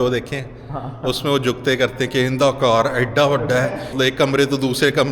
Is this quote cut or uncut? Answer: cut